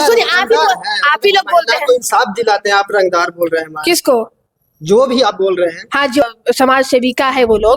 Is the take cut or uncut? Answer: cut